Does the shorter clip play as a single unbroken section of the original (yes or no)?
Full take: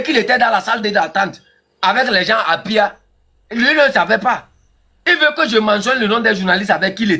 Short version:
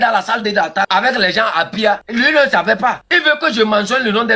no